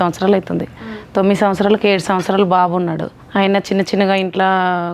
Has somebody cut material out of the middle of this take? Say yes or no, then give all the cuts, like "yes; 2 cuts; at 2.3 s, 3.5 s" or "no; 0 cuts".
yes; 1 cut; at 3.1 s